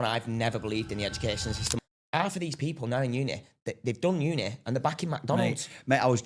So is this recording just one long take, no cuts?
no; 1 cut; at 1.7 s

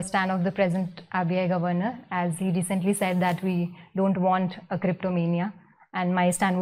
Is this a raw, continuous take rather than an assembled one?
yes; 0 cuts

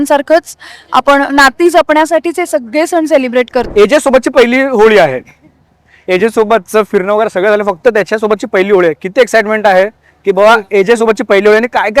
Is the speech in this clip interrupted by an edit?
yes; 1 cut; at 3.7 s

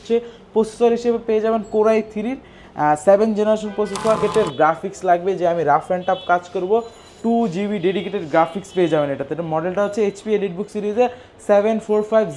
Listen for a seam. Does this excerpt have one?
yes; 1 cut; at 4.2 s

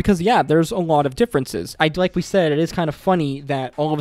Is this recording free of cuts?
no; 1 cut; at 1.6 s

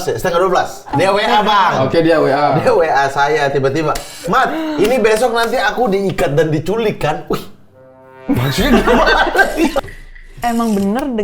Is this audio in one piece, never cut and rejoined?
no; 3 cuts; at 0.9 s, 2.5 s, 10.0 s

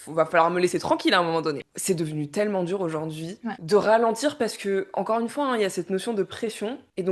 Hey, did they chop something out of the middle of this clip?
yes; 1 cut; at 1.7 s

